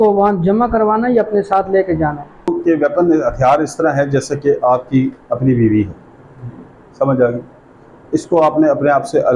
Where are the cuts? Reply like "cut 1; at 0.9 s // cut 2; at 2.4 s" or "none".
none